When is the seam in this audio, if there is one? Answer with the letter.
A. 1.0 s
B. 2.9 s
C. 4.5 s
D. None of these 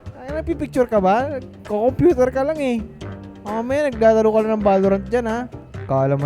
D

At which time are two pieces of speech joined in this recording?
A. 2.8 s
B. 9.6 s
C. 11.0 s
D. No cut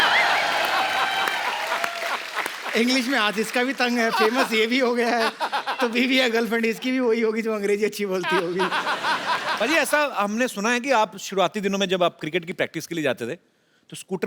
B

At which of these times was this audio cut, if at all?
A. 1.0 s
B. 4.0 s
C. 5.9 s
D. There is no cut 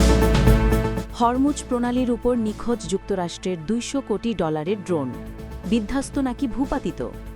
A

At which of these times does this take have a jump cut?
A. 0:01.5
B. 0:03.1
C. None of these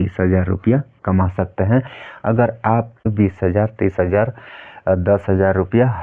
B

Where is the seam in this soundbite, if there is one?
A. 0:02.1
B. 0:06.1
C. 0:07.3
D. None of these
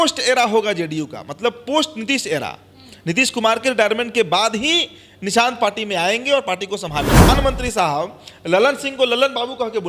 C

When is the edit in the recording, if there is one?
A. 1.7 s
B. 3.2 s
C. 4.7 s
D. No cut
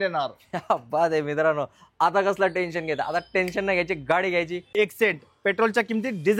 C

